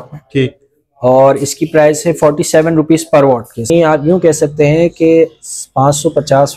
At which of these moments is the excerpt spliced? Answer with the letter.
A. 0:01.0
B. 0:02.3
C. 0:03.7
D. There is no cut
C